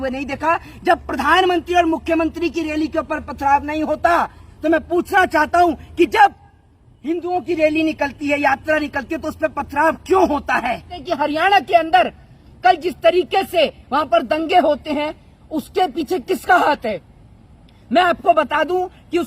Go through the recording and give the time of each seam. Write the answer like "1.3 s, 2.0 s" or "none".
11.0 s